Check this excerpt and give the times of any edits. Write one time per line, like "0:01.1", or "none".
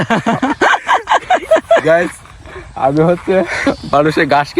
0:01.8
0:03.6